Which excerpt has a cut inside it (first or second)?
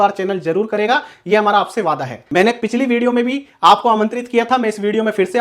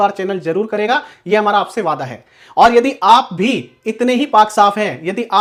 first